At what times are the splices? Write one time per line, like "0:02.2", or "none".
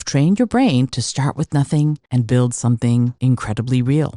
0:02.0
0:03.2